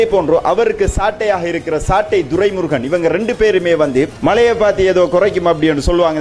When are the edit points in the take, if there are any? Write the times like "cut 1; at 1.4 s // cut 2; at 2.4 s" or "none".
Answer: none